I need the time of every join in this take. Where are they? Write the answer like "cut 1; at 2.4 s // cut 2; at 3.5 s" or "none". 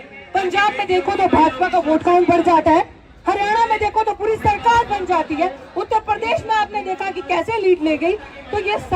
none

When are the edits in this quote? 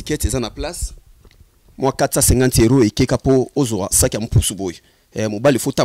none

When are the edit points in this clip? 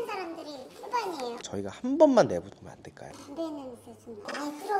cut 1; at 1.4 s

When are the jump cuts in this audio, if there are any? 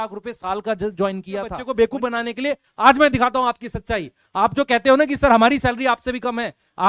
cut 1; at 1.6 s

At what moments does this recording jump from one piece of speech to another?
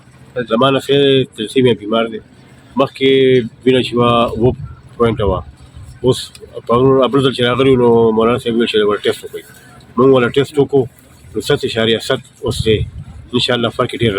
none

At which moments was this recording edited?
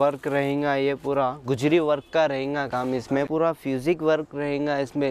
cut 1; at 3.3 s

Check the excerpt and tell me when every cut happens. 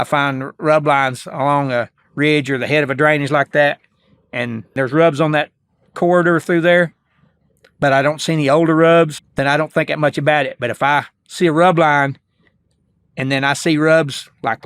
cut 1; at 4.7 s // cut 2; at 9.2 s

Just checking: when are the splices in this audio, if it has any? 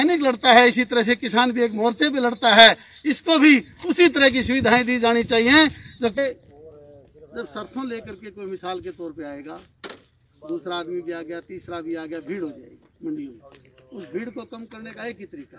cut 1; at 6.1 s

